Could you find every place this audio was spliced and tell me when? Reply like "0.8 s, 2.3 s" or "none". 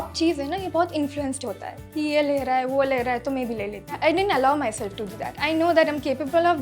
4.0 s, 5.3 s